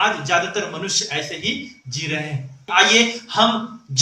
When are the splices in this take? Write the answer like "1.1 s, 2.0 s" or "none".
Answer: 2.7 s